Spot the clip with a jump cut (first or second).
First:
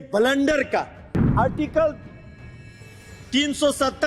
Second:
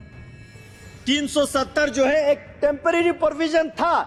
first